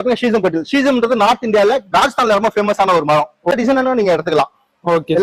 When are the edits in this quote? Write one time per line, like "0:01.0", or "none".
0:03.5